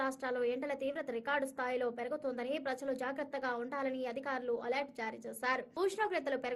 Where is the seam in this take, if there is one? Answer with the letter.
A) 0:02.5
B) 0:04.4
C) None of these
C